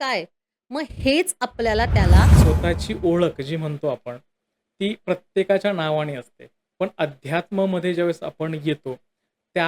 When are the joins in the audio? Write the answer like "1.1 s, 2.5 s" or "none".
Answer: 2.4 s